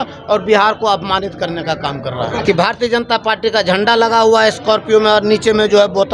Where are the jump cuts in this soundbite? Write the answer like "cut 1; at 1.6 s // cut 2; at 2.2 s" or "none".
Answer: cut 1; at 2.4 s